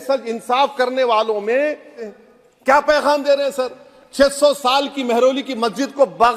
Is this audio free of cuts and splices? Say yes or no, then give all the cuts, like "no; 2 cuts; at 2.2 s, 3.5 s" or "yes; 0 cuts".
no; 1 cut; at 2.1 s